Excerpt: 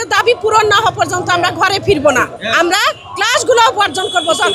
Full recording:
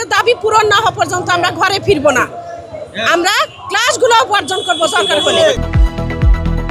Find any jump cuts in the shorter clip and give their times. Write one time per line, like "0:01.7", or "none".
0:02.4